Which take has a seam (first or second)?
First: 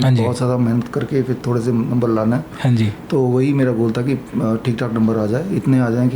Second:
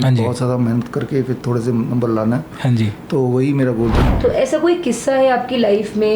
second